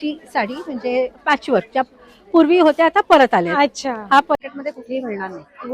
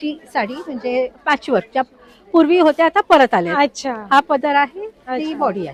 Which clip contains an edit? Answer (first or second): first